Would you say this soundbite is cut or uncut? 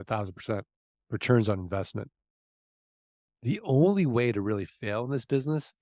uncut